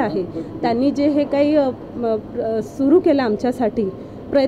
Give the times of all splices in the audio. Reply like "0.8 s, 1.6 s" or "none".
none